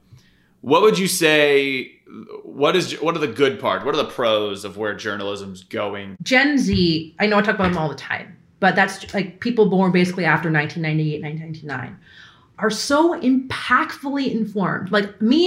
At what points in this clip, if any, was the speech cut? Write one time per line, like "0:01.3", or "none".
0:06.1